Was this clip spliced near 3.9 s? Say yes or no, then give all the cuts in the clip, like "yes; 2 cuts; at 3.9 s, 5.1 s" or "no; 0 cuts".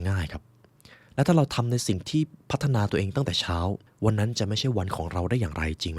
yes; 1 cut; at 3.9 s